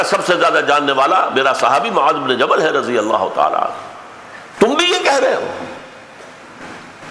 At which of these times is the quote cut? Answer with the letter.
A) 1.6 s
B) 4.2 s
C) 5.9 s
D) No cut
D